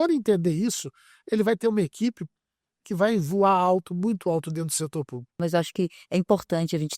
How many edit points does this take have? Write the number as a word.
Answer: one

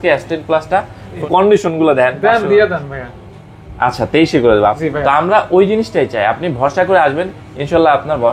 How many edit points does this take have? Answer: two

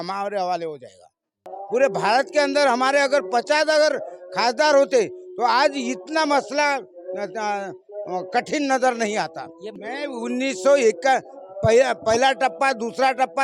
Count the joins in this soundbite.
two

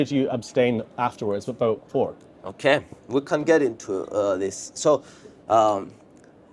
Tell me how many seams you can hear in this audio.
zero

